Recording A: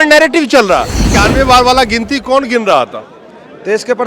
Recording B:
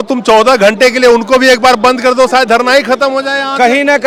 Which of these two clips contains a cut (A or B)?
A